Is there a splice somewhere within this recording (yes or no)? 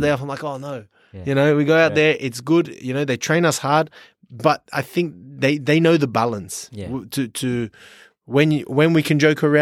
no